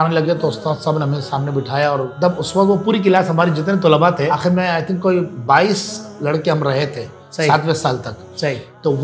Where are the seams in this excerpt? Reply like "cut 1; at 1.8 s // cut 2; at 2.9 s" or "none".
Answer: cut 1; at 2.1 s // cut 2; at 4.3 s